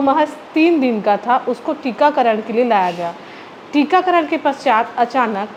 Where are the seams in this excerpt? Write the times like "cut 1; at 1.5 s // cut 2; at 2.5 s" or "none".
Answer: none